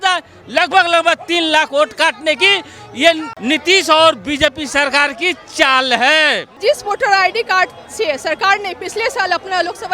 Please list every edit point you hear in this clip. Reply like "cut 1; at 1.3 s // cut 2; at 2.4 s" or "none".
cut 1; at 3.3 s // cut 2; at 6.5 s